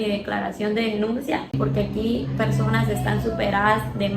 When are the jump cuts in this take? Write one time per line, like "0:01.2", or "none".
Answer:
0:01.5